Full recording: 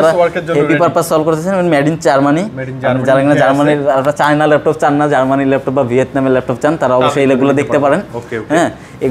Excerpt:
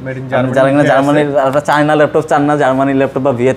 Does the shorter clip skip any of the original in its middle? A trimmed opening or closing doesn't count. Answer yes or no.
no